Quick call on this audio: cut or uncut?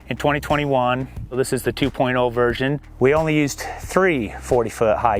cut